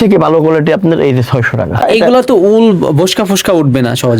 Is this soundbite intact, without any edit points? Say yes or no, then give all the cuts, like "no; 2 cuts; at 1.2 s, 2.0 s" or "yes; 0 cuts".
no; 1 cut; at 1.8 s